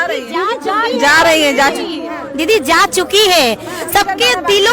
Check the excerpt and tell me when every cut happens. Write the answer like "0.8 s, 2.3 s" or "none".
none